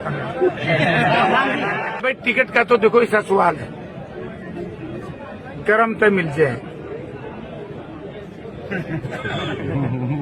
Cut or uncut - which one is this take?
cut